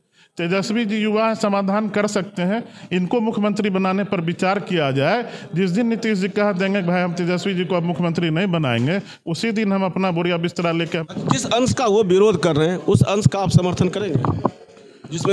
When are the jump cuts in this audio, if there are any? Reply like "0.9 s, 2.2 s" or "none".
11.0 s